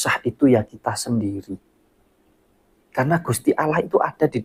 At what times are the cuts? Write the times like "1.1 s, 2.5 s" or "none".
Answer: none